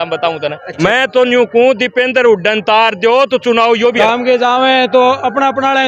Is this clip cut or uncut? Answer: cut